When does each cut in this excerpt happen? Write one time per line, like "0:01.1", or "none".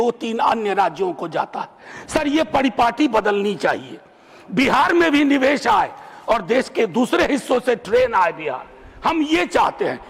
none